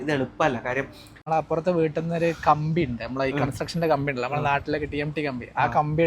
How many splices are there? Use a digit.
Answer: 1